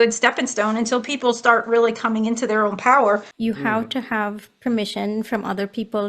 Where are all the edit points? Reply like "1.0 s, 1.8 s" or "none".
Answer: 3.3 s